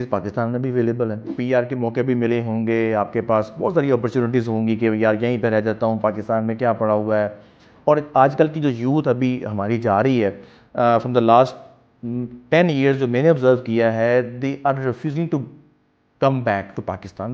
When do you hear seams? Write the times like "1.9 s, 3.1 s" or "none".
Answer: 1.3 s